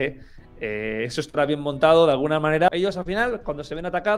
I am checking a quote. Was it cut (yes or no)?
yes